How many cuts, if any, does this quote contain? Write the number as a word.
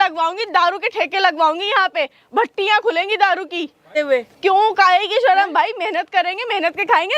zero